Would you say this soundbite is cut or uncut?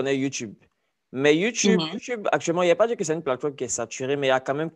uncut